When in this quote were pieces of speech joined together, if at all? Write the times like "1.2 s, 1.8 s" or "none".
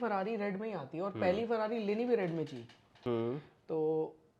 2.8 s